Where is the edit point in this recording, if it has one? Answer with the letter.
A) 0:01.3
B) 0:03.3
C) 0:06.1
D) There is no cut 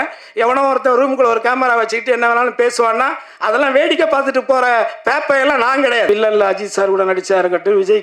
C